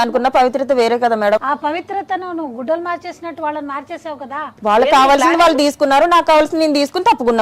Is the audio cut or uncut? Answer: cut